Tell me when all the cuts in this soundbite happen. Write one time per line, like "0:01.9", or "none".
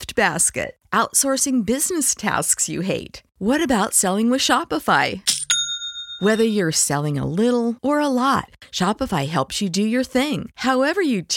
none